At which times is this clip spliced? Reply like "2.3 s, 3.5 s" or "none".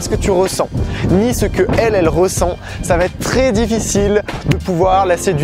none